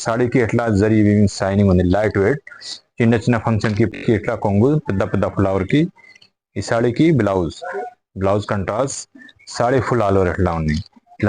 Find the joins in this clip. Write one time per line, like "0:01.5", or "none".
0:04.0